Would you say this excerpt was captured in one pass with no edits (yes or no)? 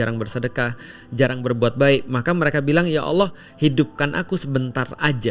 yes